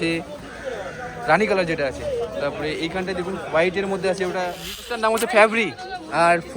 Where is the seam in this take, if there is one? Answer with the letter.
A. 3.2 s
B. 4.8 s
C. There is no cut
B